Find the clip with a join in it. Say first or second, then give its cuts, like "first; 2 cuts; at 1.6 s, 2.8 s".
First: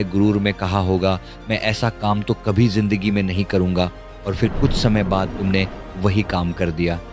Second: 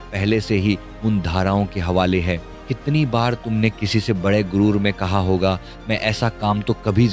second; 1 cut; at 2.5 s